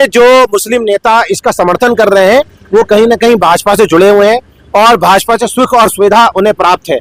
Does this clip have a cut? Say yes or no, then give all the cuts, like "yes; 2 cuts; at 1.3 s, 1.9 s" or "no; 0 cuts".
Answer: no; 0 cuts